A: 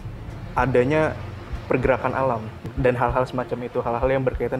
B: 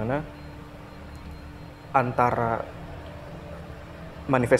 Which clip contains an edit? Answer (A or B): A